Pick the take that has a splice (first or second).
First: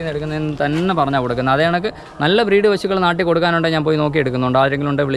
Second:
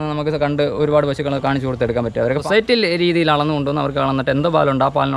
second